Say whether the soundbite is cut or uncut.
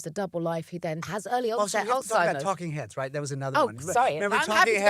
cut